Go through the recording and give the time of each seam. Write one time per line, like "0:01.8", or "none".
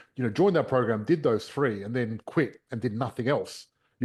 none